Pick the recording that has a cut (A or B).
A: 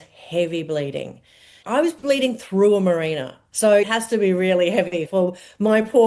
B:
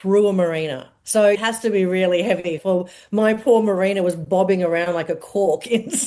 A